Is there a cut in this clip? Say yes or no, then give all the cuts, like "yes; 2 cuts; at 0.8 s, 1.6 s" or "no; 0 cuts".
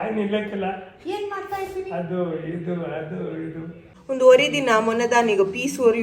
yes; 1 cut; at 3.9 s